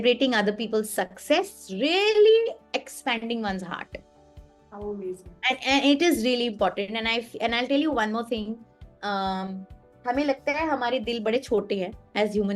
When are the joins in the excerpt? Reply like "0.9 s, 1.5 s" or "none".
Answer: none

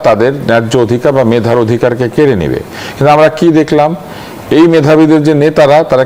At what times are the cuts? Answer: none

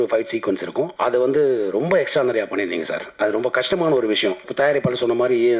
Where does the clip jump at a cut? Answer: 0.9 s, 4.5 s

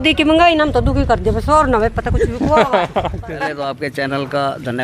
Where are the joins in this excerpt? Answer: 3.5 s

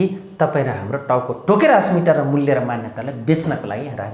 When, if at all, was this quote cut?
none

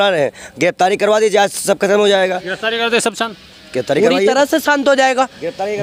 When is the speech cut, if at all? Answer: none

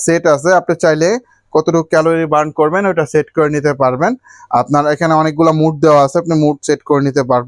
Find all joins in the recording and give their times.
none

